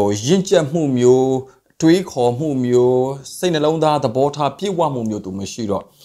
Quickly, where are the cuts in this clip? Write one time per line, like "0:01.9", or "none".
none